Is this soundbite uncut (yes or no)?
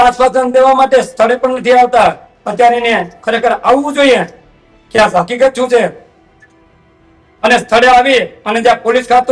yes